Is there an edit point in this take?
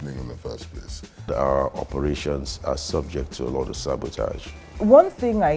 yes; 2 cuts; at 1.3 s, 4.6 s

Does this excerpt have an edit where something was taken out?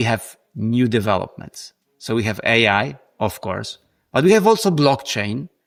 no; 0 cuts

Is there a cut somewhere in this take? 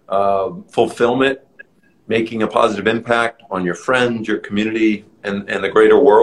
no; 0 cuts

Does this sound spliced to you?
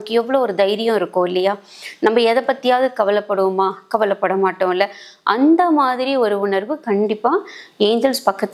no; 0 cuts

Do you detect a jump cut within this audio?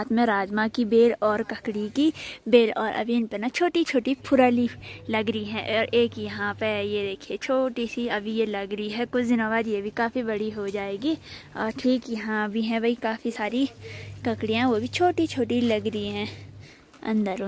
no; 0 cuts

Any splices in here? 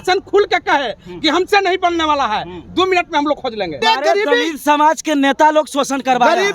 yes; 1 cut; at 3.7 s

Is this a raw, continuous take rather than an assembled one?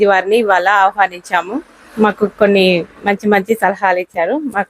yes; 0 cuts

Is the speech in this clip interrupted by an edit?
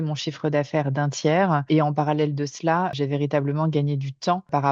yes; 1 cut; at 2.9 s

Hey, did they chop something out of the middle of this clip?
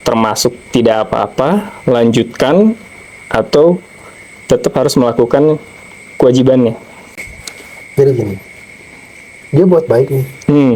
no; 0 cuts

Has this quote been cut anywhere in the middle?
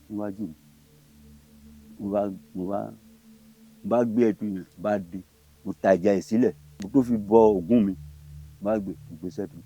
yes; 1 cut; at 6.7 s

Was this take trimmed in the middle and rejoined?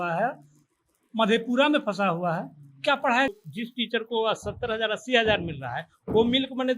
yes; 1 cut; at 3.3 s

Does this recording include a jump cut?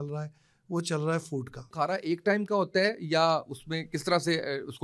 yes; 1 cut; at 1.7 s

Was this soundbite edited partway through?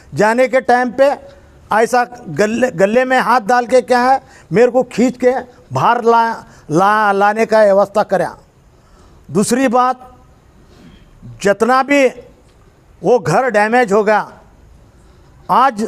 no; 0 cuts

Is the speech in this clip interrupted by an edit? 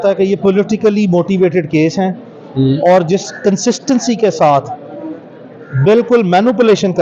no; 0 cuts

